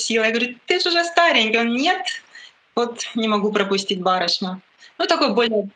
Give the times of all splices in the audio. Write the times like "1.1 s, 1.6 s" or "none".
none